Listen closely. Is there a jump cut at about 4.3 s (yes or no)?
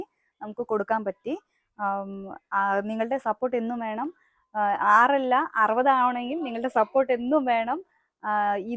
no